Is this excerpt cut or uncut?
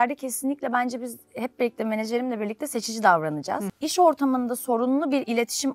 cut